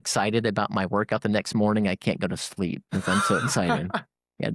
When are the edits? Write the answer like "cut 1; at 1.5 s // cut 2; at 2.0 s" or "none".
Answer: none